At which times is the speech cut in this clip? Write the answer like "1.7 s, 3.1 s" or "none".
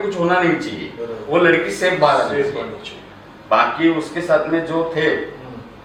none